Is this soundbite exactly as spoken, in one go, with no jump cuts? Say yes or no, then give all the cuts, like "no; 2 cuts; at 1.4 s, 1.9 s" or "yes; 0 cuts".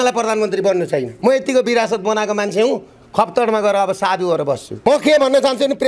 no; 2 cuts; at 1.1 s, 4.7 s